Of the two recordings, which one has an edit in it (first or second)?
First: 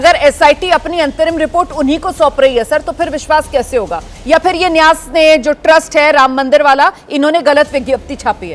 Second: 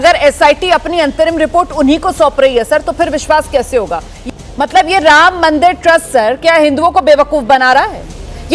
second